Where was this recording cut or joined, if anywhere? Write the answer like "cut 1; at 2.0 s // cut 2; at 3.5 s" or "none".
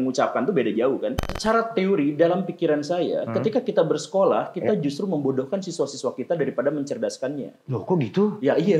cut 1; at 1.2 s